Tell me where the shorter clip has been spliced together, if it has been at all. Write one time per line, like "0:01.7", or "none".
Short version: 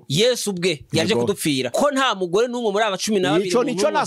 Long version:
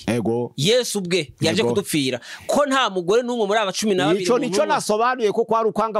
0:01.7